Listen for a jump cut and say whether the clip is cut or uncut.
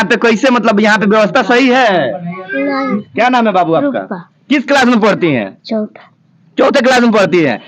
cut